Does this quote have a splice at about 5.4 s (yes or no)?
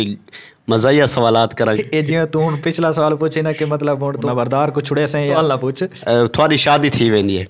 yes